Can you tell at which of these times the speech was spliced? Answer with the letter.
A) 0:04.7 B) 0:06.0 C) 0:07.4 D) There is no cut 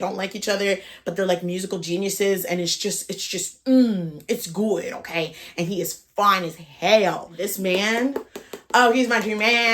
C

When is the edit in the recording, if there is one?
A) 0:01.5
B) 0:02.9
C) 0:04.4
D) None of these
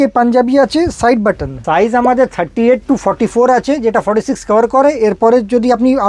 A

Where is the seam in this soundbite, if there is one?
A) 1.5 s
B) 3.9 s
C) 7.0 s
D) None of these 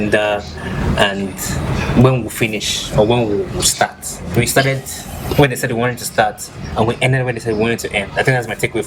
D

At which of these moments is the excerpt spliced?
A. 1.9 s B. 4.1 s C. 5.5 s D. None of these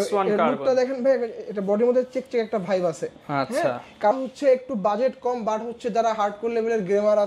B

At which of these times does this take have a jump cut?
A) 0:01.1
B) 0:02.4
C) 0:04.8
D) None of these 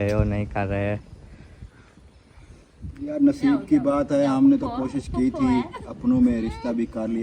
D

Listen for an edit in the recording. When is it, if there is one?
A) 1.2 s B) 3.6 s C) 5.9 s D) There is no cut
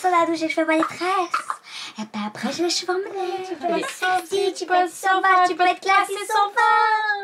B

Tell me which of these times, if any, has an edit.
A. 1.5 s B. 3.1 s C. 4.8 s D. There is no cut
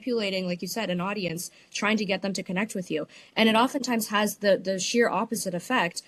D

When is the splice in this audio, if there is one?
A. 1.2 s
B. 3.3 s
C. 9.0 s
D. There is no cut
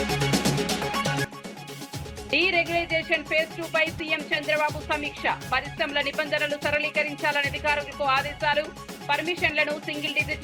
A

